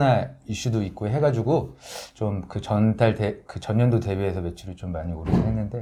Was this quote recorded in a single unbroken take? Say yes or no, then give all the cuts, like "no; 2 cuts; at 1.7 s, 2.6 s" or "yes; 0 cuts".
yes; 0 cuts